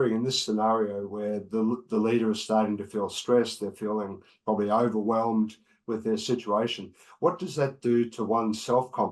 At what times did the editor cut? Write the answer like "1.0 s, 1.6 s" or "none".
none